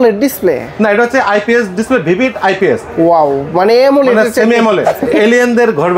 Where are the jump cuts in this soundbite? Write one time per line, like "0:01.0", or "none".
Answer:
0:04.9

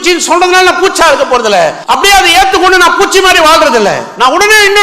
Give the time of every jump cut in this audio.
0:01.8

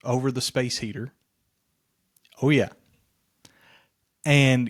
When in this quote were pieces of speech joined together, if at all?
none

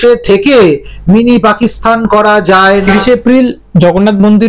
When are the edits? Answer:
0:02.9

